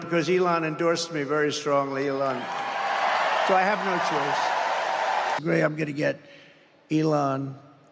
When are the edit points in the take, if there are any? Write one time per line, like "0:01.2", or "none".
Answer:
0:05.4